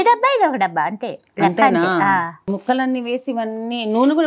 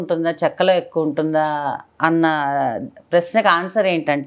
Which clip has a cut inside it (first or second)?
first